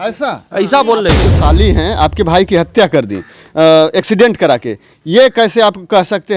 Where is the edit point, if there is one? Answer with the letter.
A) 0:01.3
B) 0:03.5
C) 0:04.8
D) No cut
A